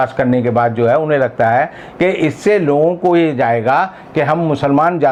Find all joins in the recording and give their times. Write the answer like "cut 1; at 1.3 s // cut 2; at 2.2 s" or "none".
none